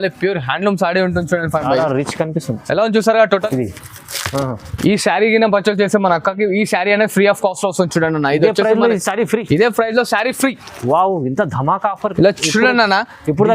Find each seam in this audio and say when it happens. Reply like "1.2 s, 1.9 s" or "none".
3.4 s